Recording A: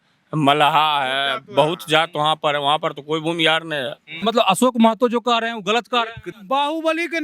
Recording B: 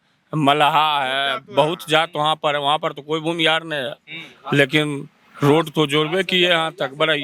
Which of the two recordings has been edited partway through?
A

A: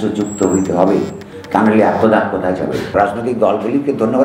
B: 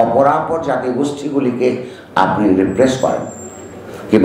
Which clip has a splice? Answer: A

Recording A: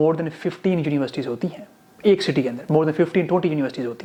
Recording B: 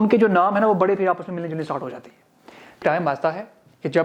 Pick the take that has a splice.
B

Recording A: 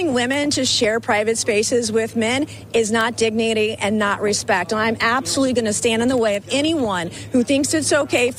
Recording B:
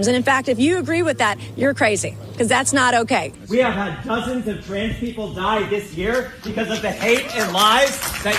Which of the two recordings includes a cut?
B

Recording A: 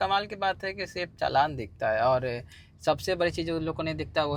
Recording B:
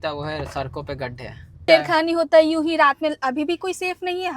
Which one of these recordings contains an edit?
B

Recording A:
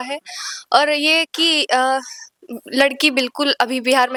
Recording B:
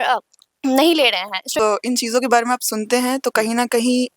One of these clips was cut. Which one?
B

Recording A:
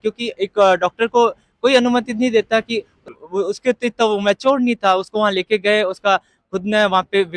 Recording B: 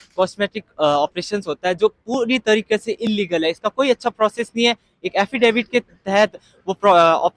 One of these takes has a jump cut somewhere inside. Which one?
A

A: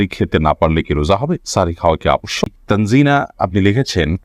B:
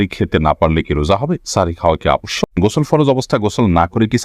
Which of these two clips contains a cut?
B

